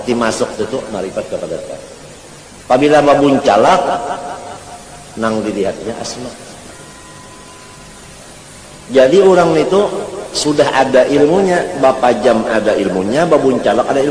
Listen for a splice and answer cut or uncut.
uncut